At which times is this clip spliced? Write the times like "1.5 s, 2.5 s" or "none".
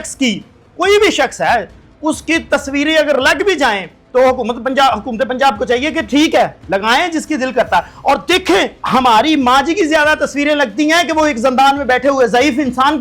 8.8 s